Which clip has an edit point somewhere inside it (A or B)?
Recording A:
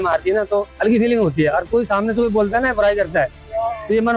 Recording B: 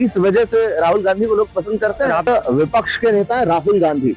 B